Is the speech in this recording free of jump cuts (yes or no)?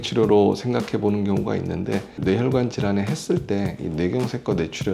yes